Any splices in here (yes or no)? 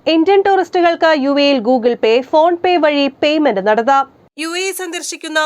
no